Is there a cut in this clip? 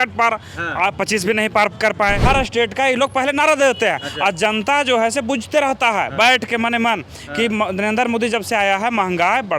yes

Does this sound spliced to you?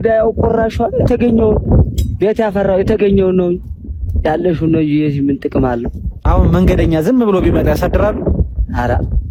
no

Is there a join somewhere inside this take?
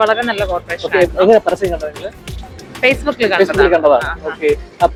no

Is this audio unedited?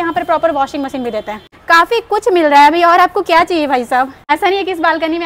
yes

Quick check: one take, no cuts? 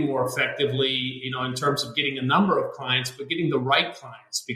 yes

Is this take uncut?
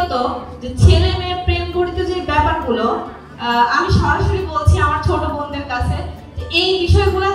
yes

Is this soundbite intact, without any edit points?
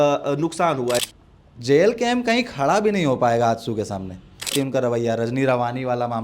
no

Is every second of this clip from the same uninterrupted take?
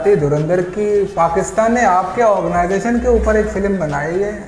yes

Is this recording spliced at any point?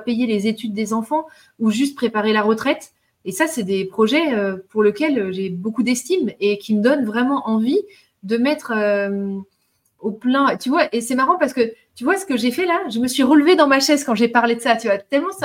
no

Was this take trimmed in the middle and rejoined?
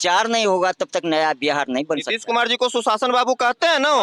no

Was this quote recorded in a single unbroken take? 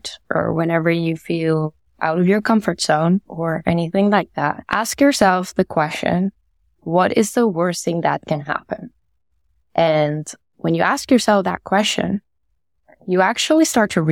no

